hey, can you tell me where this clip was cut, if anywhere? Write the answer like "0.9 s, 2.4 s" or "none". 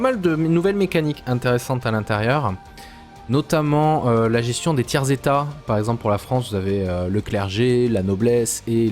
4.6 s